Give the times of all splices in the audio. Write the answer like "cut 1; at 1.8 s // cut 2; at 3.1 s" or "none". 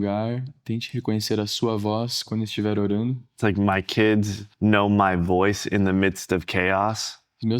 cut 1; at 3.3 s // cut 2; at 4.4 s